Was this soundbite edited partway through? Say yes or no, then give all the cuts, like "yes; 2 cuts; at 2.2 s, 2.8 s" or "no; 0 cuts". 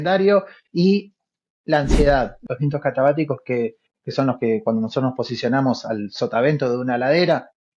yes; 1 cut; at 2.4 s